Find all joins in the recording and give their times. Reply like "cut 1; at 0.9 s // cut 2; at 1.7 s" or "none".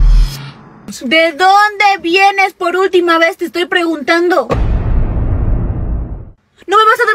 cut 1; at 1.0 s // cut 2; at 6.2 s